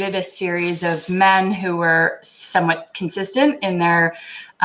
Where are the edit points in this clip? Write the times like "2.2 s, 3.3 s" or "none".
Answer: none